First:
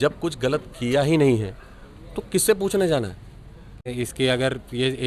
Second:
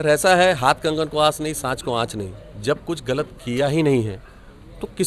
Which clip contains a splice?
first; 1 cut; at 3.9 s

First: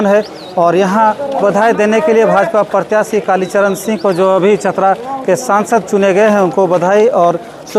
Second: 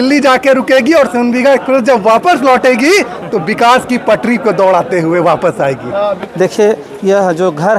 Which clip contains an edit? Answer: second; 1 cut; at 6.2 s

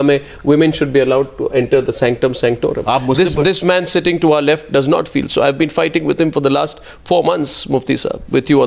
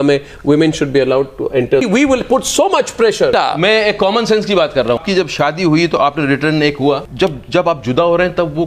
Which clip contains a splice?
second; 4 cuts; at 1.8 s, 3.3 s, 5.0 s, 7.1 s

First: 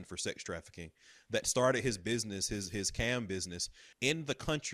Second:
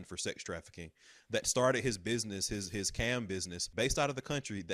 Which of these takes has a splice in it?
second; 1 cut; at 3.7 s

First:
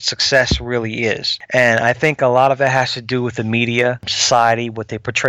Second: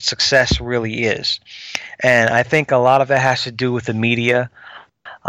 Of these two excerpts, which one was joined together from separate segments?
first; 2 cuts; at 1.3 s, 4.1 s

